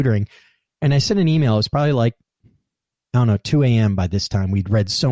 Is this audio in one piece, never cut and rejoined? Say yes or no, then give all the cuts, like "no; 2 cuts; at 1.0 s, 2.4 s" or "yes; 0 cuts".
yes; 0 cuts